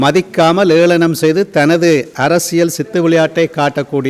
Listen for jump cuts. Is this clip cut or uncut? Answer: uncut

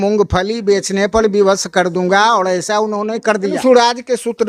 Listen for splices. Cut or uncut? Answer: cut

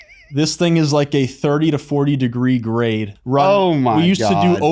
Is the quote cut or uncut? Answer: cut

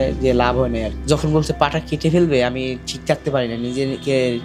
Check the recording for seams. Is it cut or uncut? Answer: cut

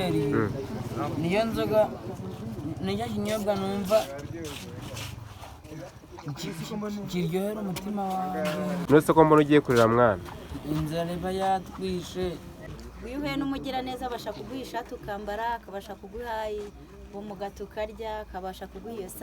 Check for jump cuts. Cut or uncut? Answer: cut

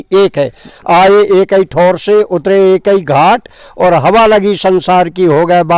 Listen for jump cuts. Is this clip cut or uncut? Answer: uncut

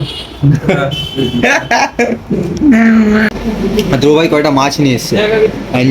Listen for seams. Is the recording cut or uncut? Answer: cut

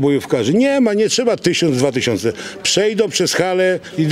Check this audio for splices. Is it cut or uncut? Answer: uncut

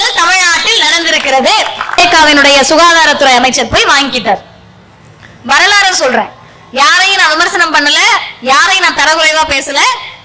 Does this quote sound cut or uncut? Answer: cut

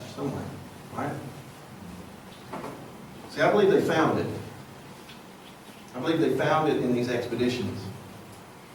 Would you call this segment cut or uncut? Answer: uncut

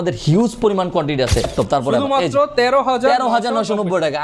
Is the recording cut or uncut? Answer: cut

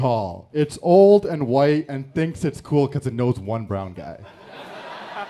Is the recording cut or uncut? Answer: uncut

